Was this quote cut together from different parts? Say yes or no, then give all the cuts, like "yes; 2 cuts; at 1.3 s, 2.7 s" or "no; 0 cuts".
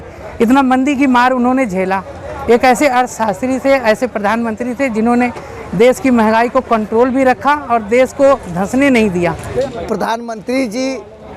yes; 1 cut; at 9.6 s